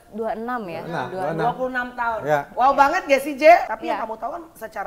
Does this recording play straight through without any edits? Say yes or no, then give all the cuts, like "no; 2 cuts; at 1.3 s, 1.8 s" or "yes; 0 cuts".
no; 1 cut; at 3.7 s